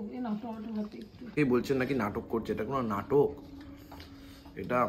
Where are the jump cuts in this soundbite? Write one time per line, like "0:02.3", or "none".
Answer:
0:01.2

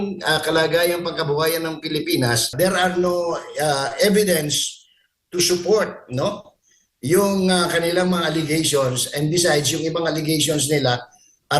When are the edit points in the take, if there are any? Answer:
0:02.5

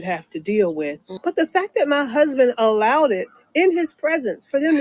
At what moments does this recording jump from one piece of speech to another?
0:01.1

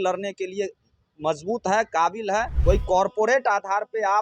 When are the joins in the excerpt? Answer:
0:02.5

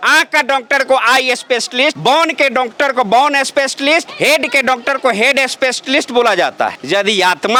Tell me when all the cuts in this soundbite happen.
none

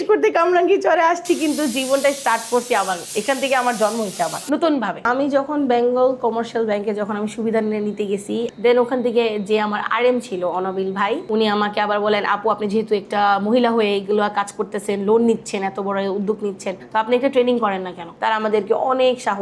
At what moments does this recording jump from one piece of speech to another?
0:18.2

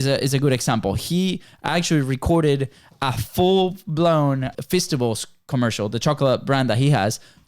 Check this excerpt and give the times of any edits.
0:04.5

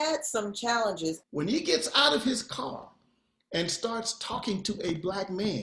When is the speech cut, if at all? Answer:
0:01.2

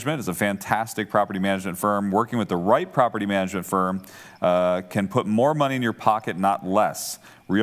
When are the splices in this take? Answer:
none

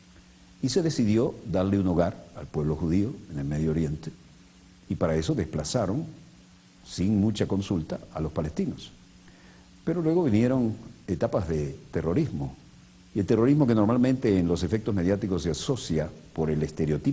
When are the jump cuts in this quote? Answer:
0:01.9

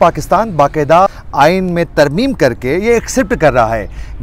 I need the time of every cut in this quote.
0:01.1

